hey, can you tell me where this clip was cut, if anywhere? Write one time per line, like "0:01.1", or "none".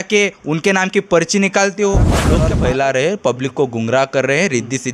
0:02.3